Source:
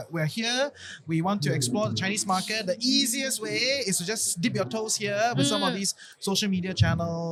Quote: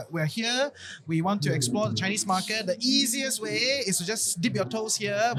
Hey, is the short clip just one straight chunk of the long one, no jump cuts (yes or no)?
yes